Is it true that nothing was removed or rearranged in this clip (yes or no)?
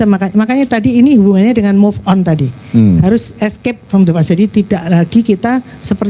yes